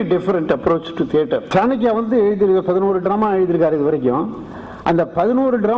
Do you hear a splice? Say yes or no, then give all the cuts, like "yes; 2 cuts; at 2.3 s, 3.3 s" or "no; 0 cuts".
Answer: yes; 1 cut; at 1.5 s